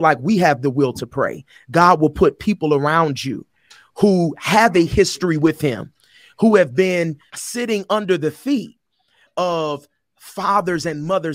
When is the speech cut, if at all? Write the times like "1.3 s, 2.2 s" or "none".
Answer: 7.3 s, 9.2 s

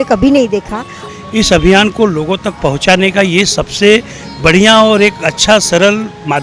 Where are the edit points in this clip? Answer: 1.0 s

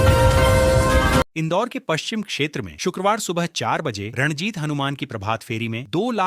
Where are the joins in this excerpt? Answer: 1.3 s

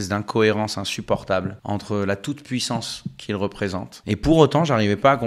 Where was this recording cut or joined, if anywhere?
1.6 s, 3.9 s

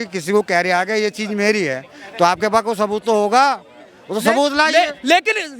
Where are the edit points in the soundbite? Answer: none

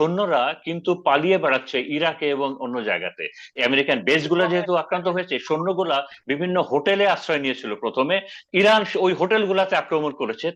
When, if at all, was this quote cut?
3.5 s, 8.4 s

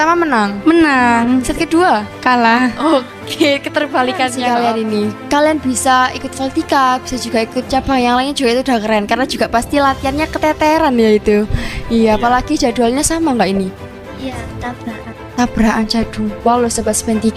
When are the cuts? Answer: 4.4 s

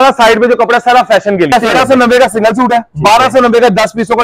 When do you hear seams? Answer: 1.5 s

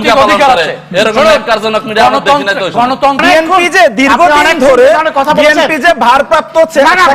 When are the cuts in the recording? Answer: 3.2 s

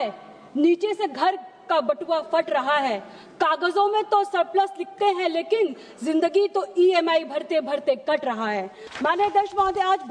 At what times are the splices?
8.8 s

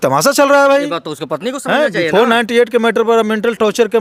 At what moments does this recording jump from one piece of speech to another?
none

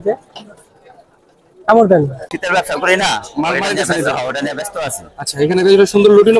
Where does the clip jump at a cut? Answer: 2.2 s

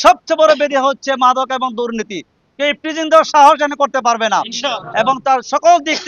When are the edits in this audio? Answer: 2.4 s

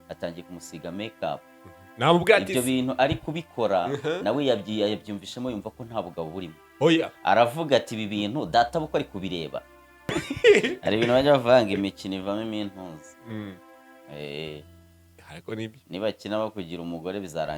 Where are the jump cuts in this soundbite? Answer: 10.1 s

